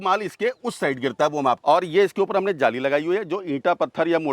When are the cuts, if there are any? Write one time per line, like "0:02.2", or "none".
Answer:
0:01.6